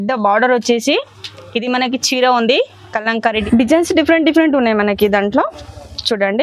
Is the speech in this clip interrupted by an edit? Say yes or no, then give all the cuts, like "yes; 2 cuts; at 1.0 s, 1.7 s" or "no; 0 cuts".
yes; 1 cut; at 3.4 s